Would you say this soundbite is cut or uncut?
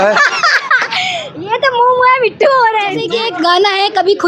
cut